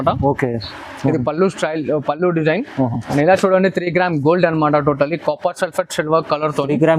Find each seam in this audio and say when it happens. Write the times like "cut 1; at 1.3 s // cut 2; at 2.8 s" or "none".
cut 1; at 3.0 s